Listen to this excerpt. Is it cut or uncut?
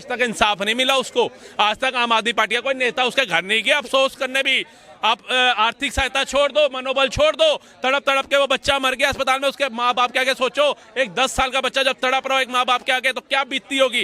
uncut